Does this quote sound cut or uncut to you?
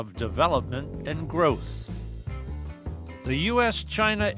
uncut